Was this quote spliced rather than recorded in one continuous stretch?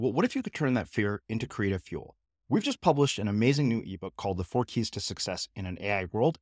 no; 0 cuts

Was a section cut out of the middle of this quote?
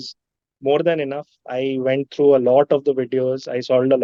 no; 0 cuts

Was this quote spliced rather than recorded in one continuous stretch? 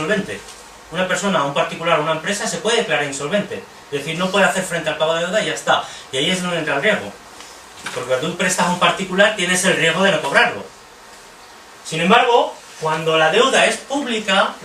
yes; 1 cut; at 5.0 s

